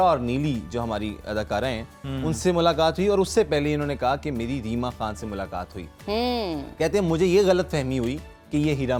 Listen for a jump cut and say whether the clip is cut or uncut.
uncut